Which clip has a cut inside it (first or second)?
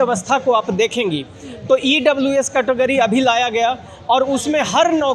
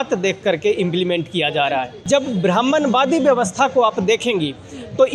second